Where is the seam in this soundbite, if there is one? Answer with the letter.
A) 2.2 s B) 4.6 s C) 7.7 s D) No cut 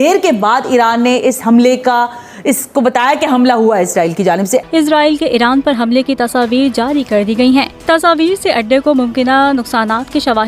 B